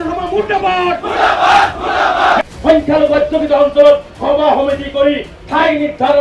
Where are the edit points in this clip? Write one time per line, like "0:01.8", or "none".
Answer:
0:02.5

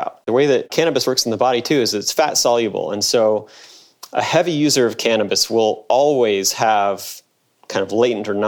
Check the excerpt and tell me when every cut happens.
none

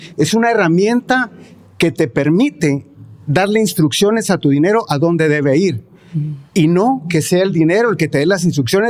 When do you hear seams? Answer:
none

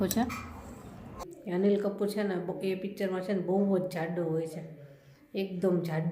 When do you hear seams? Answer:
0:01.1

